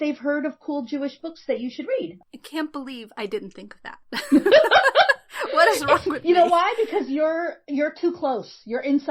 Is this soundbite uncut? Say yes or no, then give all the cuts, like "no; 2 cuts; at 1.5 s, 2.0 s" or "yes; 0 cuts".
no; 1 cut; at 2.2 s